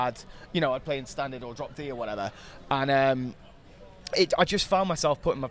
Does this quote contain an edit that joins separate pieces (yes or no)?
no